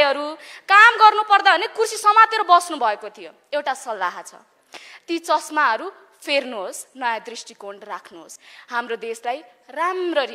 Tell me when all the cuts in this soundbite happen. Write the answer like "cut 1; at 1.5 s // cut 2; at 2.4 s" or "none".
none